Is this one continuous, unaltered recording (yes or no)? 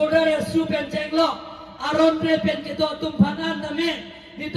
yes